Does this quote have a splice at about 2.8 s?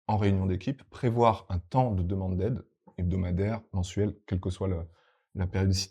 yes; 1 cut; at 2.8 s

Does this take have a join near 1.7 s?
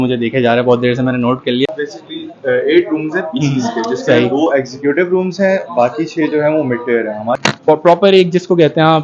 yes; 2 cuts; at 1.7 s, 7.3 s

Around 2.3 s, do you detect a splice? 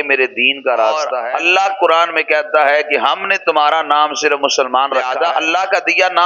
no; 2 cuts; at 1.1 s, 5.1 s

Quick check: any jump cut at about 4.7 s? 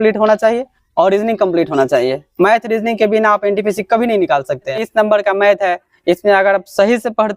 yes; 1 cut; at 4.7 s

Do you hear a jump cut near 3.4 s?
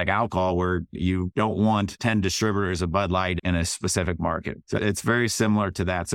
yes; 4 cuts; at 0.9 s, 1.9 s, 3.4 s, 4.6 s

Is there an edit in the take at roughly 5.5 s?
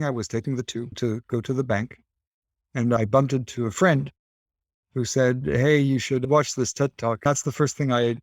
no; 3 cuts; at 0.9 s, 3.0 s, 7.2 s

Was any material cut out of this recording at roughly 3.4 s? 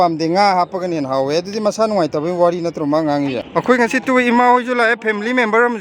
yes; 1 cut; at 3.4 s

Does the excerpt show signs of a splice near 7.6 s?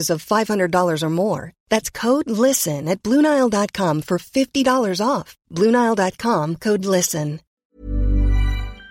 yes; 1 cut; at 7.6 s

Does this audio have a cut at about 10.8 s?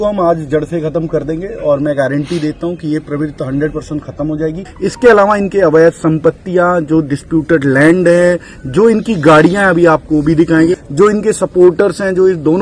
yes; 2 cuts; at 4.7 s, 10.8 s

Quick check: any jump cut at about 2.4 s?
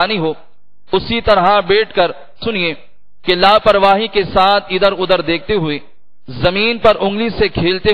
yes; 1 cut; at 2.4 s

